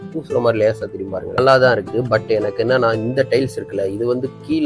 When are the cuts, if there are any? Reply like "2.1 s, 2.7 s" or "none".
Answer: 1.4 s